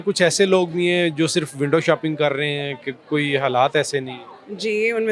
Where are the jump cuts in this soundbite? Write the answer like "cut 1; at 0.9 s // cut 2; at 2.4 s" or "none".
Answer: none